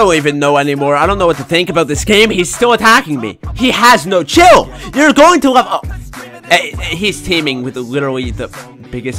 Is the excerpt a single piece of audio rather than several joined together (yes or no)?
yes